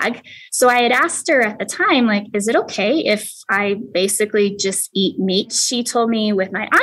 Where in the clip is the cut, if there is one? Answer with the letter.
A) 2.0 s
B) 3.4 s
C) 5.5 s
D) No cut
C